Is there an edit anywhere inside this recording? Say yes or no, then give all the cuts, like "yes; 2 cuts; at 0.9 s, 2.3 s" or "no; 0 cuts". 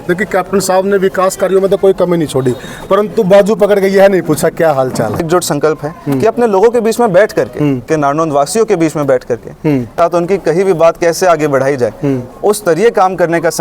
yes; 3 cuts; at 5.3 s, 7.9 s, 9.9 s